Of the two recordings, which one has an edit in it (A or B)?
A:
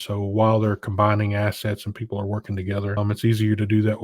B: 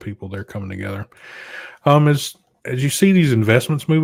A